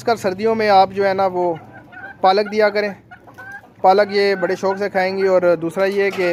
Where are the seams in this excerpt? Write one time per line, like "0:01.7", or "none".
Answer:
none